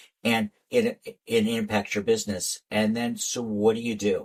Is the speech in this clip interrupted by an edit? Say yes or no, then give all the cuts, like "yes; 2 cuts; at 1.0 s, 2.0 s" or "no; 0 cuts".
no; 0 cuts